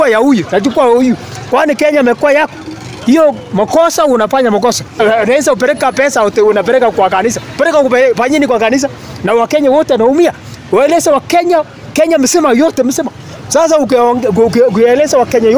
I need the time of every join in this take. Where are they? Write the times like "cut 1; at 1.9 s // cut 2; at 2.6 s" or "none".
cut 1; at 5.0 s